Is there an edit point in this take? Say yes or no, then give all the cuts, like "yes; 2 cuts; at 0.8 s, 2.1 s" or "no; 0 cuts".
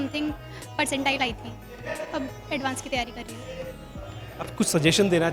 no; 0 cuts